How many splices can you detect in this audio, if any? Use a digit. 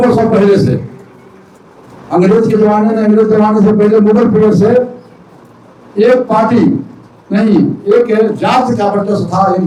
0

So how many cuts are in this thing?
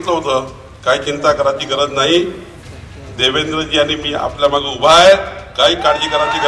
0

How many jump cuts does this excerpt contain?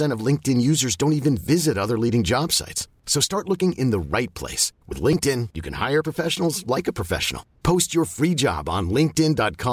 0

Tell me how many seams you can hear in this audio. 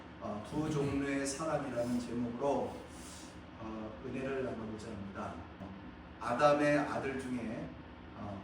1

